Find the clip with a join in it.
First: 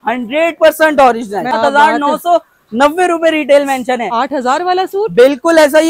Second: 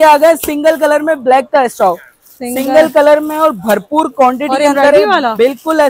first; 1 cut; at 1.5 s

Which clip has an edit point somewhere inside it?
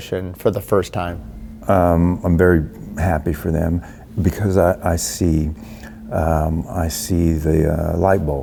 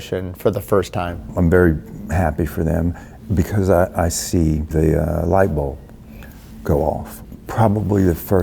second; 3 cuts; at 1.3 s, 4.7 s, 7.1 s

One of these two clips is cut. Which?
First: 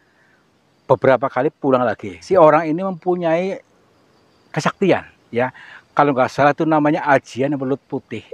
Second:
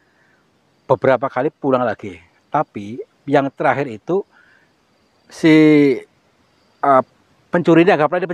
first; 1 cut; at 2.2 s

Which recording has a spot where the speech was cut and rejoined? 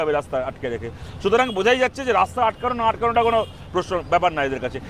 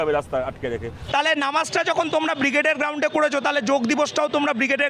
second; 1 cut; at 0.9 s

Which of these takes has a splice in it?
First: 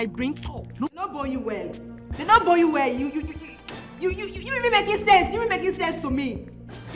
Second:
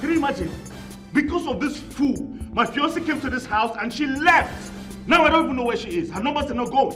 first; 1 cut; at 1.1 s

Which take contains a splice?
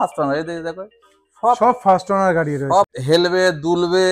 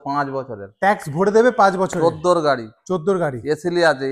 first; 1 cut; at 2.9 s

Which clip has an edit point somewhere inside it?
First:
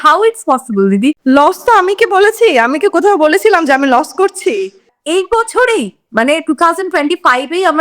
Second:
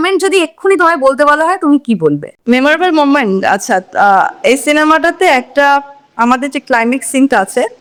first; 1 cut; at 4.9 s

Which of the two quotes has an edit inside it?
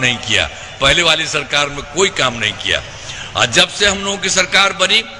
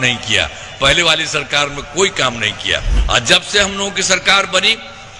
second; 1 cut; at 2.9 s

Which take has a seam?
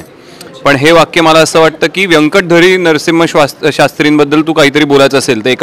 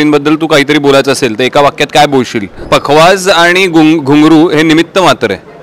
second; 1 cut; at 2.6 s

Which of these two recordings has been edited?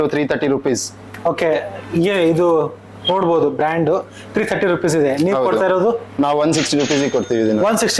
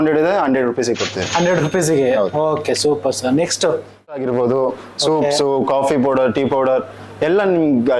second; 1 cut; at 4.2 s

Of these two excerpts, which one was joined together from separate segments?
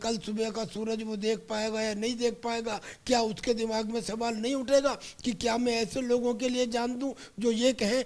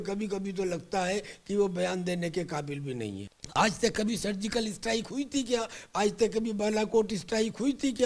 second; 1 cut; at 3.3 s

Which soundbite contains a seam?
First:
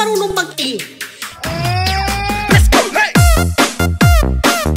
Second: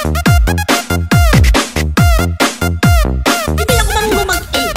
second; 1 cut; at 3.5 s

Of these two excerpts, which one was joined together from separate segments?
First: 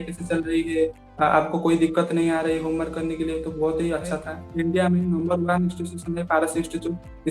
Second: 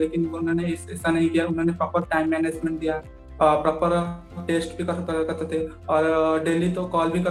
first; 1 cut; at 4.4 s

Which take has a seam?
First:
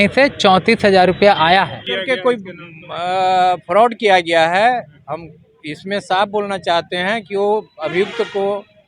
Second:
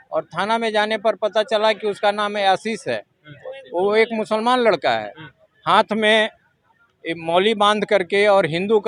first; 1 cut; at 1.9 s

